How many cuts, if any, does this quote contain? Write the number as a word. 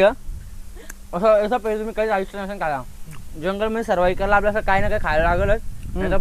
zero